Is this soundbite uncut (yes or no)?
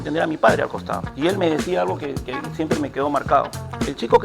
no